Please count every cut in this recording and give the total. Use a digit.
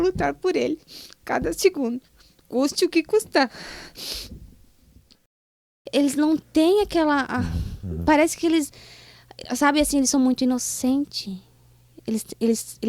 1